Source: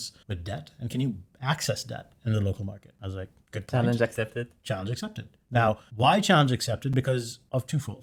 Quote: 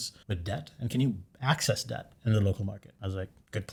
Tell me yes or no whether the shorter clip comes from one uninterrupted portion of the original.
yes